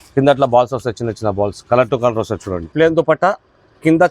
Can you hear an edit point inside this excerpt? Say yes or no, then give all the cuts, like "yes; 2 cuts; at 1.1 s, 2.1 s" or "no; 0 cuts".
yes; 1 cut; at 2.7 s